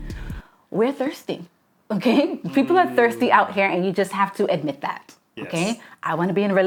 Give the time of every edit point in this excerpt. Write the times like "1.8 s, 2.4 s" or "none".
none